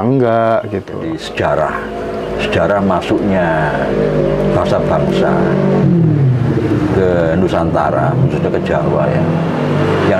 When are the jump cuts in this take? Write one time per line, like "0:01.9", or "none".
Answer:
0:01.2